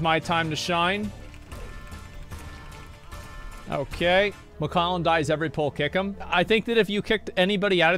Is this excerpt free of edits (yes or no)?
no